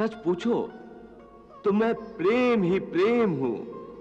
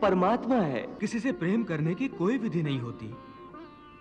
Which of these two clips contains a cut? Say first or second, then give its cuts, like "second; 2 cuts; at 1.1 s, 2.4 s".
second; 1 cut; at 1.0 s